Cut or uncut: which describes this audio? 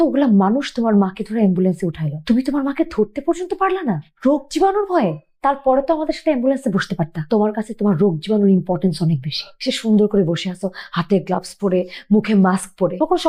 uncut